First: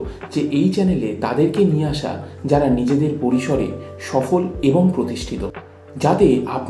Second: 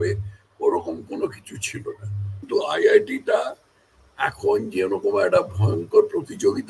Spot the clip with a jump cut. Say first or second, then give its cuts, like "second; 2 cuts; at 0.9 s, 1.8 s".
second; 1 cut; at 2.5 s